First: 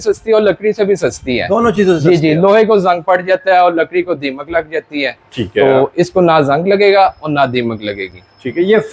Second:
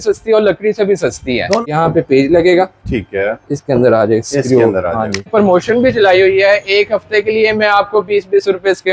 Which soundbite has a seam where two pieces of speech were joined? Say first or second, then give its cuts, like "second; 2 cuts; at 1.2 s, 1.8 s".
second; 2 cuts; at 1.6 s, 5.3 s